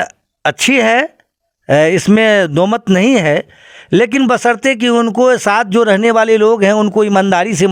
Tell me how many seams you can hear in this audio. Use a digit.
0